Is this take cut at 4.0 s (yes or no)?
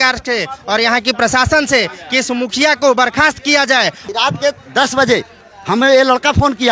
yes